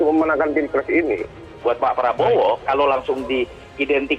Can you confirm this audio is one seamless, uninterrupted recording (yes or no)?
no